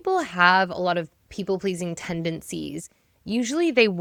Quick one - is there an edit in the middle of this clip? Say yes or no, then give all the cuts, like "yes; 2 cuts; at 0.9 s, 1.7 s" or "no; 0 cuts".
no; 0 cuts